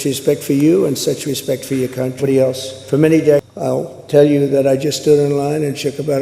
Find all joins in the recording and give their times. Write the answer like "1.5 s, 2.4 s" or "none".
3.5 s